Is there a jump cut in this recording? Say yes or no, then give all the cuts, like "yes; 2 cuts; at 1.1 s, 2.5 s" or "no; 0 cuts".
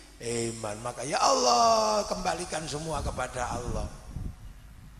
no; 0 cuts